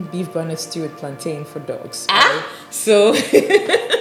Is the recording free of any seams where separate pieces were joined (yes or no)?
yes